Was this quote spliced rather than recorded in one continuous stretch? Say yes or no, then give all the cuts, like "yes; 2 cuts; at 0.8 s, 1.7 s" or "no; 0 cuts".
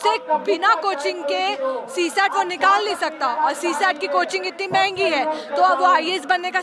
no; 0 cuts